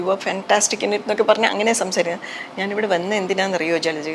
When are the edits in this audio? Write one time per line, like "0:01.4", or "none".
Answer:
none